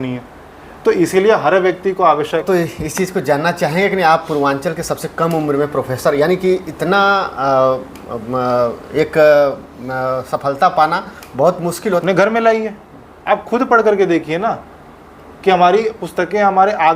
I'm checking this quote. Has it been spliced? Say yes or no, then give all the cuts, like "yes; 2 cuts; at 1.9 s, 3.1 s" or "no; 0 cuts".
yes; 2 cuts; at 2.4 s, 11.7 s